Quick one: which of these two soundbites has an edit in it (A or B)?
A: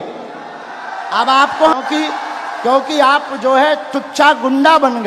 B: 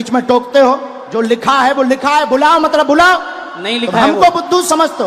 A